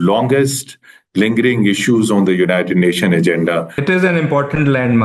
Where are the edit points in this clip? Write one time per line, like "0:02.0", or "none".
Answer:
0:03.8